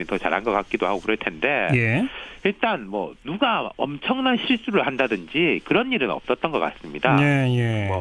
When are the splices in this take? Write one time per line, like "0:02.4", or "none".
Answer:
0:02.1